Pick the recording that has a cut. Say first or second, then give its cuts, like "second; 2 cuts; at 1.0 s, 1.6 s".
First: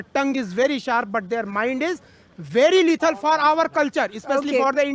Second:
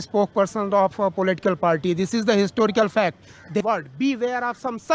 second; 1 cut; at 3.6 s